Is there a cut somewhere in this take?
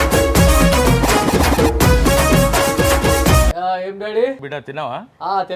yes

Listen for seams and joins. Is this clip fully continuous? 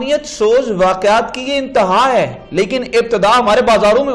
yes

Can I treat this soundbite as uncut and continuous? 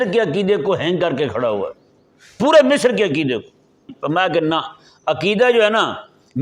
no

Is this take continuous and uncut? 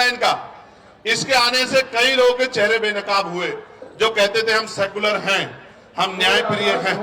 yes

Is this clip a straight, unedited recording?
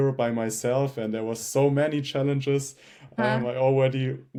yes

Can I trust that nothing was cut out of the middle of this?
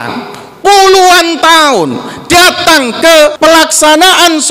no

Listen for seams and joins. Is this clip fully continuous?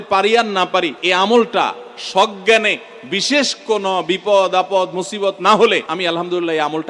no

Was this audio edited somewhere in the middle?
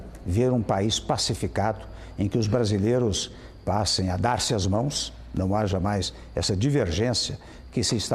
no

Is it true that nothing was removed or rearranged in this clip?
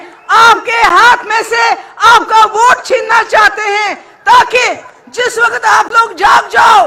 yes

